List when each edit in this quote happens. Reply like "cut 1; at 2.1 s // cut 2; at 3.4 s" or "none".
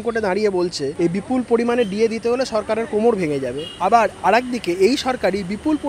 cut 1; at 0.9 s // cut 2; at 3.6 s

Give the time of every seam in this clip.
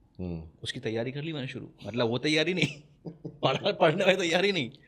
none

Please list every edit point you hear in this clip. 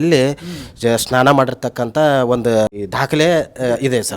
cut 1; at 2.7 s

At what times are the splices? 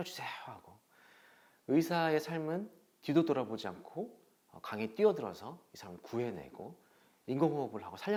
none

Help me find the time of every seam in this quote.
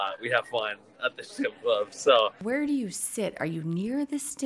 cut 1; at 2.4 s

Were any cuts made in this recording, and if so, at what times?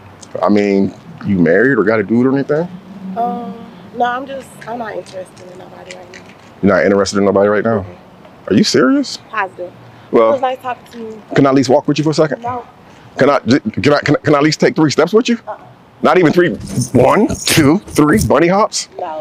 none

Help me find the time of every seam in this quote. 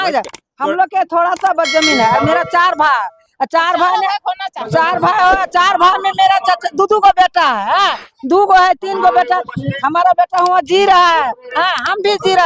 none

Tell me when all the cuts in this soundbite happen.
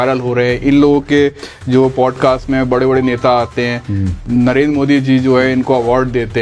cut 1; at 4.2 s

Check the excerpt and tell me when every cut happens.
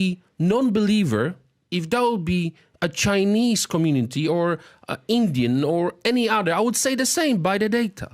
none

